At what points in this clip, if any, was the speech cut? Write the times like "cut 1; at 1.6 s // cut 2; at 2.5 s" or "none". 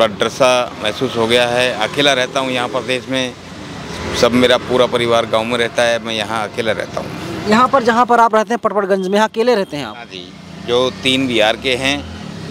none